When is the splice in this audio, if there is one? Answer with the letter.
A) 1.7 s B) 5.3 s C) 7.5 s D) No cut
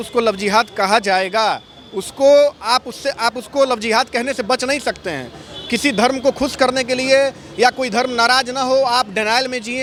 D